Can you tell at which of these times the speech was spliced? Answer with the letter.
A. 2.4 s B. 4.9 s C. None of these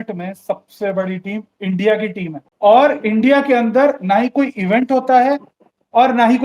A